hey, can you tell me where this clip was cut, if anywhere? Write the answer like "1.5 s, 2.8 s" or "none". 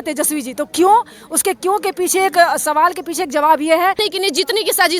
4.0 s